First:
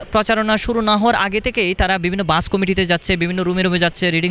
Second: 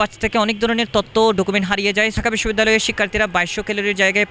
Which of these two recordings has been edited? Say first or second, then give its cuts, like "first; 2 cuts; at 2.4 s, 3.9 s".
second; 1 cut; at 2.2 s